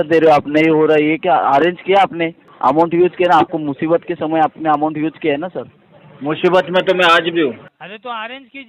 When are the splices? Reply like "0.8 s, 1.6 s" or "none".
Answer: 2.4 s, 7.7 s